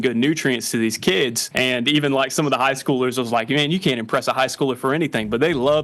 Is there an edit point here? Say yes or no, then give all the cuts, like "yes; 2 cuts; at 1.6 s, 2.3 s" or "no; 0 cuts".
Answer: yes; 1 cut; at 1.4 s